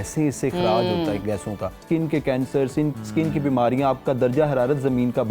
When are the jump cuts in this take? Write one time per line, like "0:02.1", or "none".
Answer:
0:01.8